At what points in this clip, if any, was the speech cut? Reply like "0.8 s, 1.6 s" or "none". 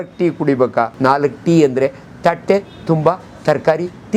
0.9 s